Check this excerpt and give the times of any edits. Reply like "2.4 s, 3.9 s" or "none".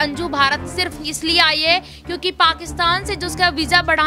none